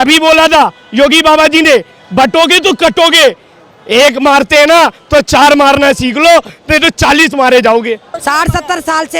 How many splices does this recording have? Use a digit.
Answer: 1